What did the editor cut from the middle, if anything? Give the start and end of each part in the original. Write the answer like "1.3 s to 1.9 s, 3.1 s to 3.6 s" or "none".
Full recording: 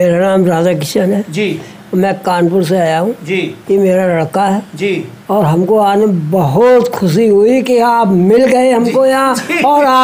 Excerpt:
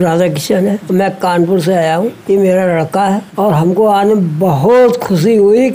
1.3 s to 1.8 s, 3.2 s to 3.6 s, 4.7 s to 5.2 s